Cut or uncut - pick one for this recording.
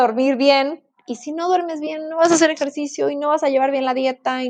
uncut